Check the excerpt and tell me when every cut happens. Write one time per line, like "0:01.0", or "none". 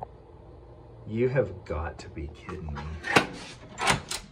none